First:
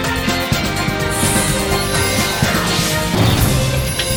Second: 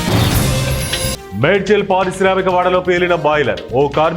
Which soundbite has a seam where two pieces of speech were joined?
second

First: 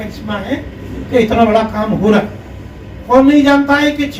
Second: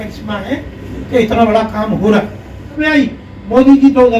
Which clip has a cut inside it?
second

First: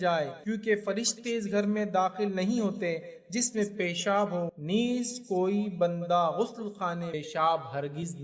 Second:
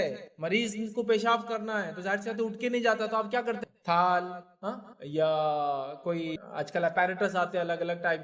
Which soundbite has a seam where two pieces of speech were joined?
first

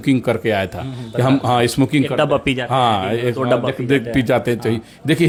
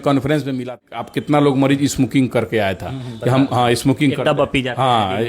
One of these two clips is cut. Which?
second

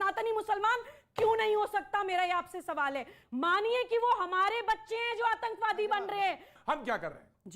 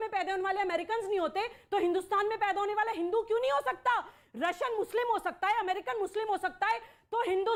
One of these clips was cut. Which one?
first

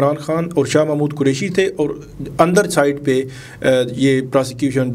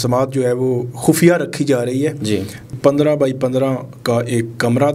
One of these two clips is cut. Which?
second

